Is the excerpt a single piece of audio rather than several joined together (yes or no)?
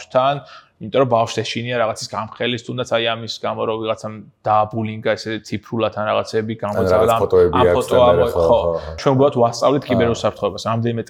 no